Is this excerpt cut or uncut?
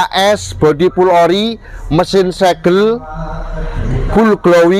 uncut